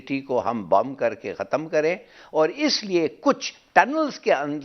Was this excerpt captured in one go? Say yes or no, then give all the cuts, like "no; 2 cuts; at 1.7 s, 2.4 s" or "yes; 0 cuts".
yes; 0 cuts